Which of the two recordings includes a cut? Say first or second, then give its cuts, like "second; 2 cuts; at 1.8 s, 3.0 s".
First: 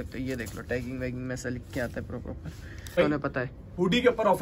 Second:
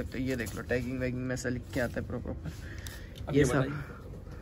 first; 1 cut; at 3.0 s